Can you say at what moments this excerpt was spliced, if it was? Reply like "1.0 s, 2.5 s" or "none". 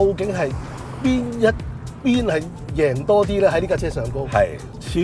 none